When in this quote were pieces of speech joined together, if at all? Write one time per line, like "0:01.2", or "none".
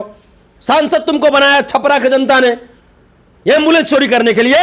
none